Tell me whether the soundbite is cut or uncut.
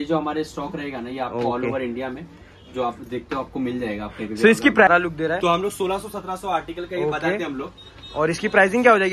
cut